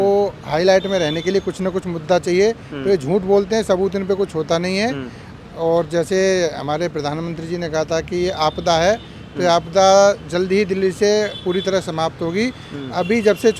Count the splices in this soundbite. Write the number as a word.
zero